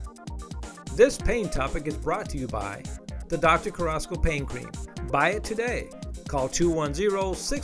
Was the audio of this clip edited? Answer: yes; 1 cut; at 0.9 s

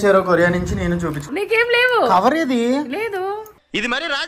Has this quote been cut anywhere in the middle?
yes; 1 cut; at 1.2 s

